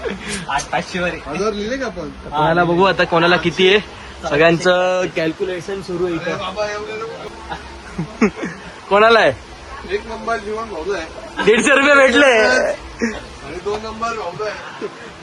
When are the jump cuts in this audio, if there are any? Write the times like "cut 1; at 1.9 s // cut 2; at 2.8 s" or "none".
cut 1; at 7.2 s